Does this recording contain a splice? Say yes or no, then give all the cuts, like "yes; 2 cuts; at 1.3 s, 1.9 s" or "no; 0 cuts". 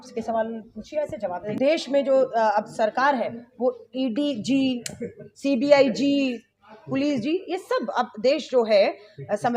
yes; 1 cut; at 1.5 s